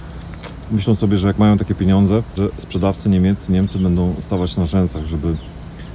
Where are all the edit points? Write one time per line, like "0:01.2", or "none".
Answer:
0:02.4

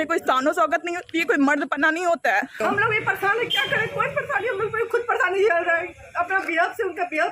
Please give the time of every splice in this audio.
0:02.6

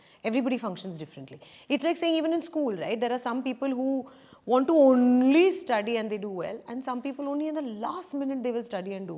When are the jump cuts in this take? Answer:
none

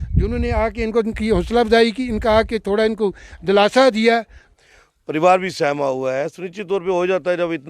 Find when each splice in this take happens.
0:04.4

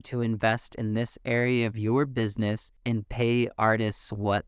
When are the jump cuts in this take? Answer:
0:02.7

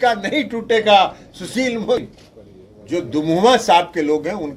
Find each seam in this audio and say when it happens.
0:02.1

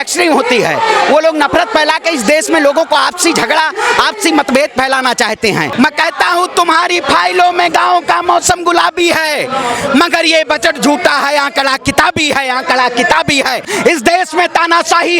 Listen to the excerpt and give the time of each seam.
0:05.7
0:13.6

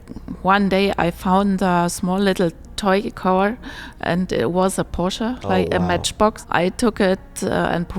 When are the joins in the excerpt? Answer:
0:06.4

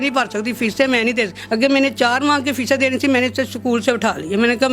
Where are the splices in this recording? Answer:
0:01.4

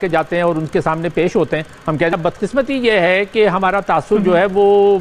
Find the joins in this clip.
0:02.1

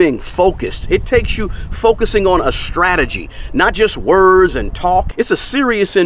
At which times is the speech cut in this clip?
0:05.1

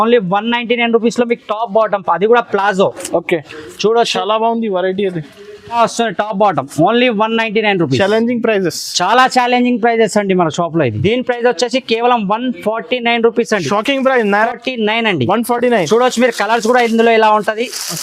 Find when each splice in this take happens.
0:05.7
0:11.0
0:14.5

